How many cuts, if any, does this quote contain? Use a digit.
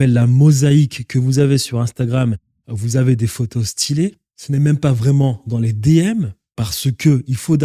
1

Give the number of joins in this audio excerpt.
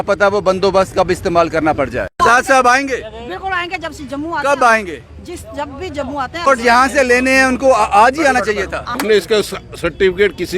3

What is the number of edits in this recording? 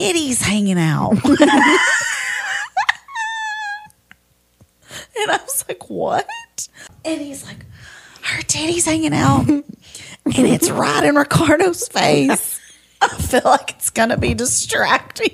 1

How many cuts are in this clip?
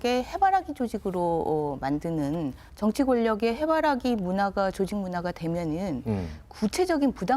1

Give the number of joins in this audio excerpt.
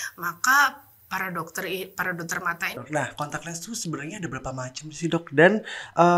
1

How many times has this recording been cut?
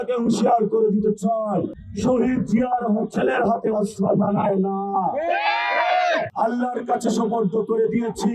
2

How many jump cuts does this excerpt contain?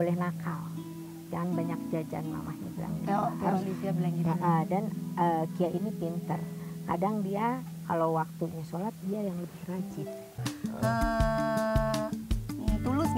1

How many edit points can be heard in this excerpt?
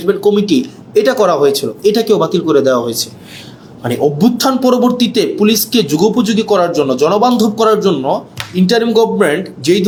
0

